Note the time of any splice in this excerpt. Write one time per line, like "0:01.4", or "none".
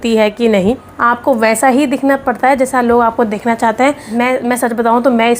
0:00.9
0:04.0